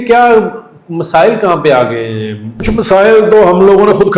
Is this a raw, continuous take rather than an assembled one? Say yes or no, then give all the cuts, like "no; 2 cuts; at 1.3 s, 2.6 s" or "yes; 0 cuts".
no; 1 cut; at 2.7 s